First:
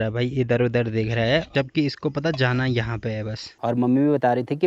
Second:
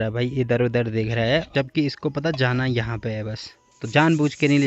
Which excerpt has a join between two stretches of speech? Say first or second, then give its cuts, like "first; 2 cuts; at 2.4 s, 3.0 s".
first; 1 cut; at 3.4 s